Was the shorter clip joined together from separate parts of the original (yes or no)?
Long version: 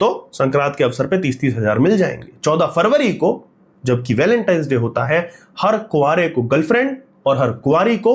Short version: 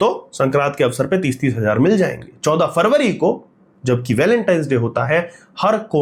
no